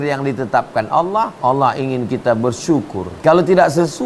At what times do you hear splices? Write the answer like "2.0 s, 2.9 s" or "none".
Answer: 1.3 s, 3.0 s